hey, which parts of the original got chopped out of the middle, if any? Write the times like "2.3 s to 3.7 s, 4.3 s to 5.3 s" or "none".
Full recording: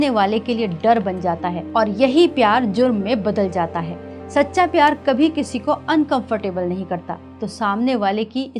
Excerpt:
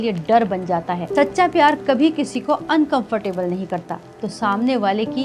1.5 s to 4.2 s